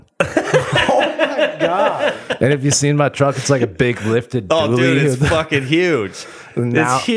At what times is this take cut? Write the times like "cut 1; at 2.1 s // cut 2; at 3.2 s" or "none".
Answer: none

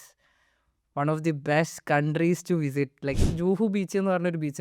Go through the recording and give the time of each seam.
cut 1; at 3.3 s

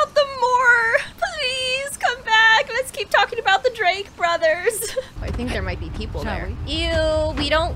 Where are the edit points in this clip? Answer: cut 1; at 1.1 s // cut 2; at 5.2 s // cut 3; at 6.6 s

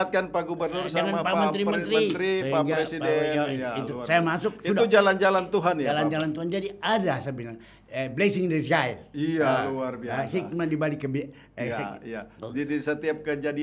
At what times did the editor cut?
none

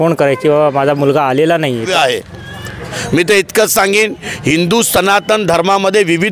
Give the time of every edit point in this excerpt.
cut 1; at 1.9 s

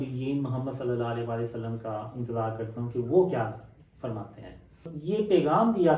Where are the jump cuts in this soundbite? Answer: cut 1; at 4.9 s

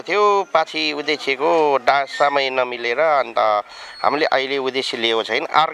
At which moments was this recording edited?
none

